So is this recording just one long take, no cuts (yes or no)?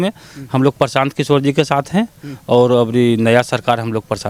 yes